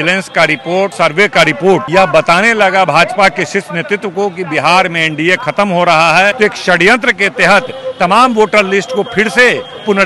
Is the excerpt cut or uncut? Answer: cut